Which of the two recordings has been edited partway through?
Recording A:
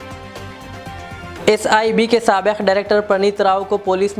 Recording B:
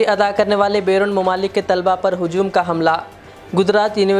A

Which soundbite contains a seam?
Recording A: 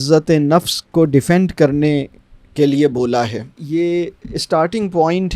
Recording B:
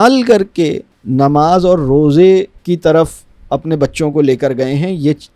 A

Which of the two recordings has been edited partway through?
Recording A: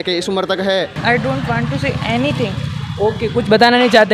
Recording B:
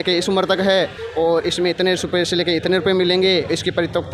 A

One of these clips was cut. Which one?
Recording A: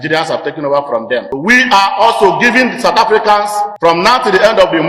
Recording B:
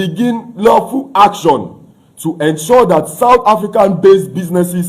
A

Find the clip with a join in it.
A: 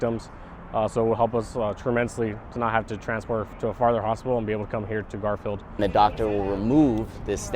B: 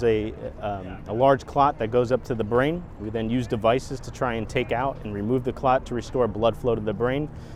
A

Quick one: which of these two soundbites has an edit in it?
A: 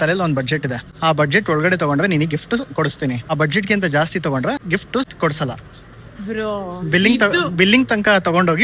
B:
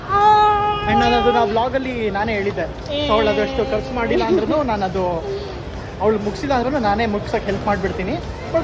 A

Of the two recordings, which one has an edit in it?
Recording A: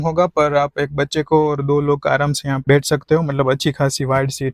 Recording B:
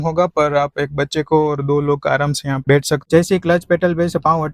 B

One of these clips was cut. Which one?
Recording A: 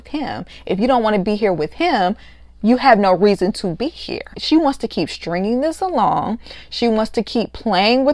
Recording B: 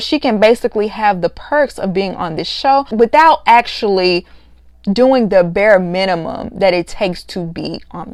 A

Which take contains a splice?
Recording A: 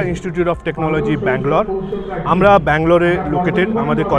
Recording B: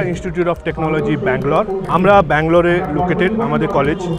B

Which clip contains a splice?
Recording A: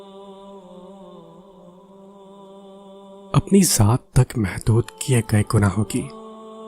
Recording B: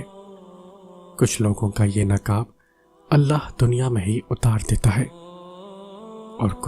A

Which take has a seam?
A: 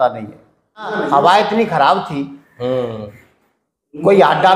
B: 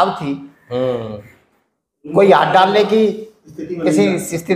A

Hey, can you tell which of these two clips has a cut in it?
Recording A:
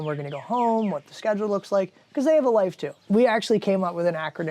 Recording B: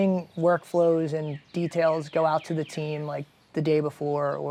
A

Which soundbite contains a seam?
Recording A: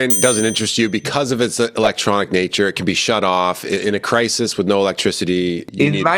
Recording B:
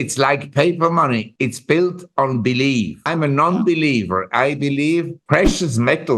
B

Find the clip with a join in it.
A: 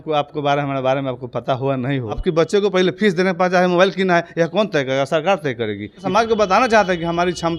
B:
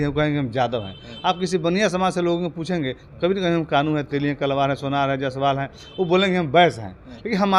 A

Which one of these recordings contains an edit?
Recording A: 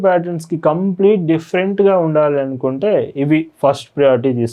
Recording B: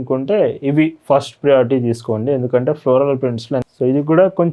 B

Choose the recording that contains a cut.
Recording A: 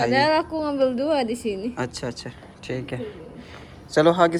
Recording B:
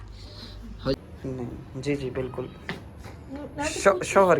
B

